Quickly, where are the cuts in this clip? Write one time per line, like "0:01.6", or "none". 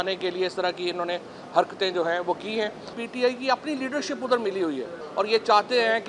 0:03.0
0:05.0